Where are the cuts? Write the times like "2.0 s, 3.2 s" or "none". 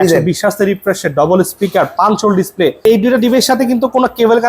2.8 s